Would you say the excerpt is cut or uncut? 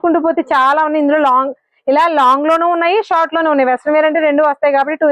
uncut